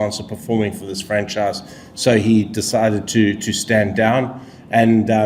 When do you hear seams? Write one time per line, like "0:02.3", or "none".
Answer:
none